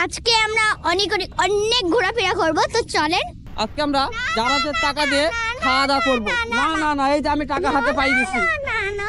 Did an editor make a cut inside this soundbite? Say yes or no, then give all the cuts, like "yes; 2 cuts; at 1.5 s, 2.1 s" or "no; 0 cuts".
yes; 1 cut; at 3.5 s